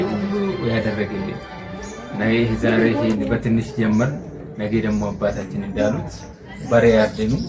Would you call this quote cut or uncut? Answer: uncut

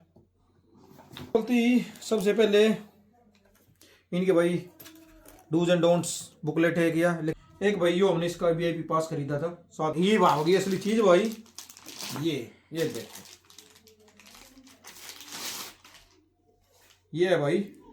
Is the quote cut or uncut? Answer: cut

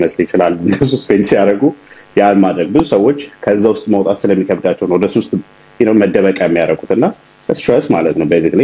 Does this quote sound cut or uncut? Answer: uncut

